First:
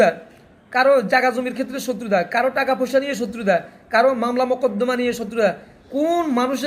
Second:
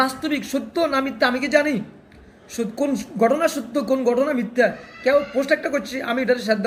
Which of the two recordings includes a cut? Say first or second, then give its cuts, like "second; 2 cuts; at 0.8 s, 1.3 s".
first; 1 cut; at 5.7 s